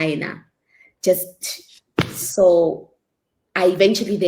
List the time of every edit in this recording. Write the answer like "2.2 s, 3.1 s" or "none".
none